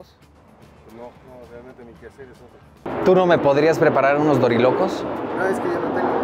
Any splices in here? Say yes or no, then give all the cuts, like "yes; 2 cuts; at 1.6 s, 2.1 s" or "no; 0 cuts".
yes; 1 cut; at 2.9 s